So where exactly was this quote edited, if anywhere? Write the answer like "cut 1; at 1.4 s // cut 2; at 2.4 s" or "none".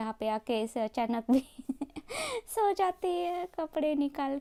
none